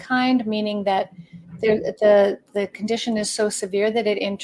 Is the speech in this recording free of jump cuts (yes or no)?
yes